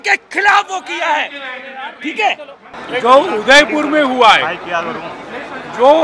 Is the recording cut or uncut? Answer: cut